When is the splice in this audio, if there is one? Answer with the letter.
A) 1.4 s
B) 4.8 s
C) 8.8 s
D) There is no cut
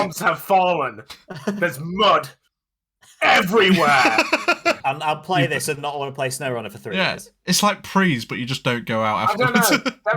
B